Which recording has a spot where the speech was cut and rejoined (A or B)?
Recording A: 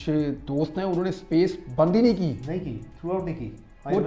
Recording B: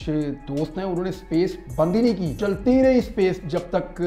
B